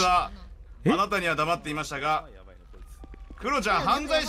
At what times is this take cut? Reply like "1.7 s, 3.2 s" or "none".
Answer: none